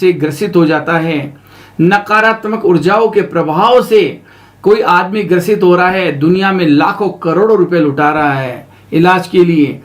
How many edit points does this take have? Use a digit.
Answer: 0